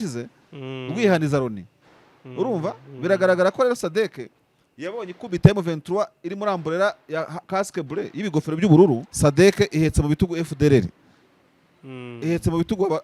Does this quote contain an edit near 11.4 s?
no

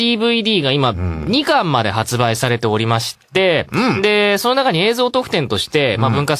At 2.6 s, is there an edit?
yes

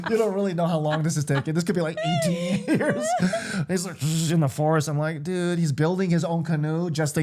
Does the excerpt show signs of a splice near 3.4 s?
no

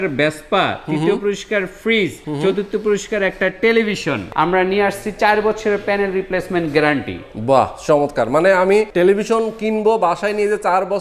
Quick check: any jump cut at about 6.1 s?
no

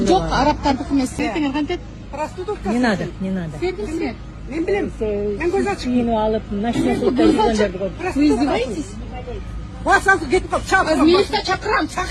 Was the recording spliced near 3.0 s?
no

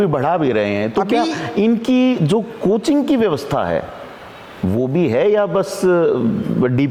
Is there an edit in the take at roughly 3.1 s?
no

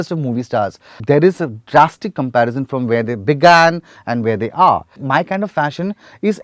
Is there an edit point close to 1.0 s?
yes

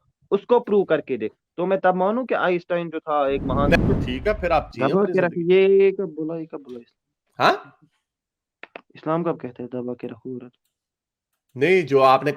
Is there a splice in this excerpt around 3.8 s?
yes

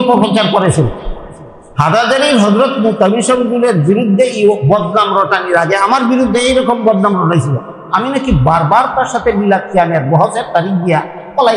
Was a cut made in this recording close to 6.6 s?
no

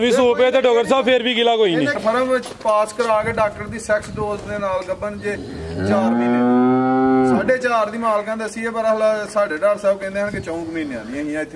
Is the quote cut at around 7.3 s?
no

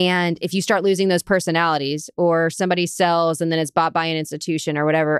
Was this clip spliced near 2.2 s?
no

